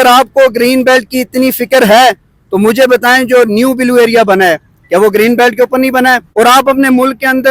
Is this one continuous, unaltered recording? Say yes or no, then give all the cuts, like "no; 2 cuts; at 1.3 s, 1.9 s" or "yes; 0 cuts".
no; 1 cut; at 6.2 s